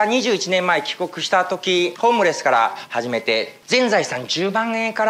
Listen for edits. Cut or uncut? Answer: cut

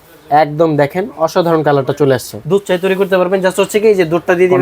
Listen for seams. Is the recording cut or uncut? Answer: cut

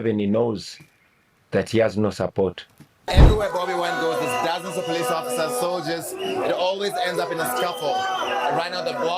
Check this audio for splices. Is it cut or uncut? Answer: cut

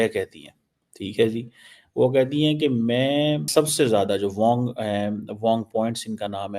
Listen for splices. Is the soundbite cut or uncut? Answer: cut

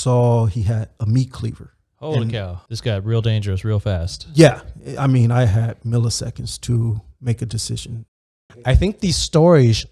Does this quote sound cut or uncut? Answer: cut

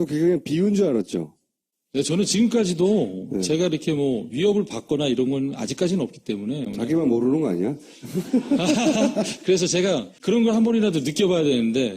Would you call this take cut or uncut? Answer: cut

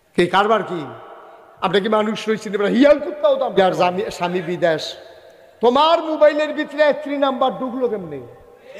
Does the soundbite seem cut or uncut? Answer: cut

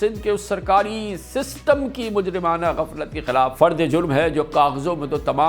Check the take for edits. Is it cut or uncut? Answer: cut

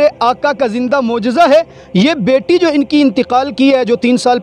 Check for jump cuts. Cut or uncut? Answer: uncut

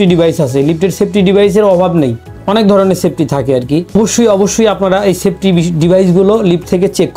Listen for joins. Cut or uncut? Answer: uncut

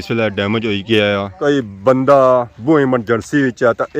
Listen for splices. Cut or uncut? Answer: cut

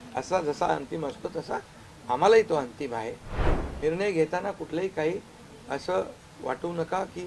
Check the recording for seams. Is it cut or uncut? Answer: cut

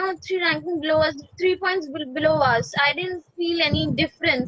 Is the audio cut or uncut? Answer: uncut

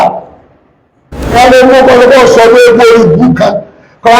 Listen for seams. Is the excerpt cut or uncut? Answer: cut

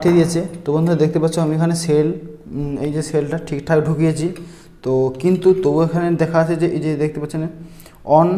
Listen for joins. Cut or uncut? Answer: uncut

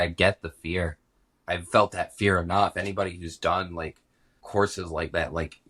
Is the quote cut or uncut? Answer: uncut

